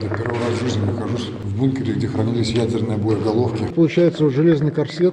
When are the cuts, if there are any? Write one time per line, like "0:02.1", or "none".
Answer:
0:01.4
0:03.7